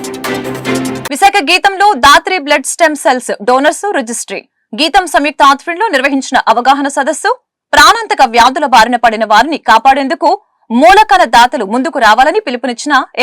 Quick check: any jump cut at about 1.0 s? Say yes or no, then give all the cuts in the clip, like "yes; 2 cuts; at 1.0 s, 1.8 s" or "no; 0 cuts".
yes; 1 cut; at 1.0 s